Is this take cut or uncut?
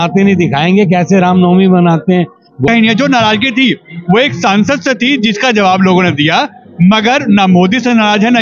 cut